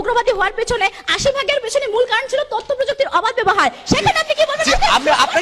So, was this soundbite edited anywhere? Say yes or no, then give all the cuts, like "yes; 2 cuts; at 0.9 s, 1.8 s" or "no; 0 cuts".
no; 0 cuts